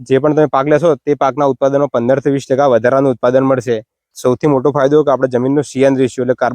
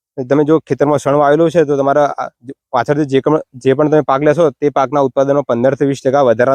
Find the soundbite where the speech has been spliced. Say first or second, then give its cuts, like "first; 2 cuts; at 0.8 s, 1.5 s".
first; 1 cut; at 4.1 s